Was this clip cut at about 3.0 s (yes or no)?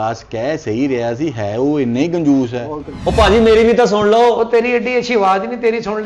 yes